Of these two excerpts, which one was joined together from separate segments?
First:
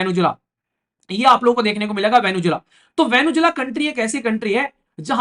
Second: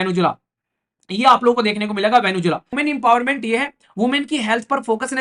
second; 1 cut; at 2.8 s

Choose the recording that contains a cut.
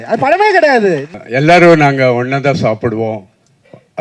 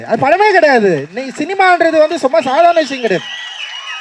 first; 1 cut; at 1.2 s

